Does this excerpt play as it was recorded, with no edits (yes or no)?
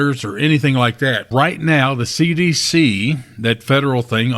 no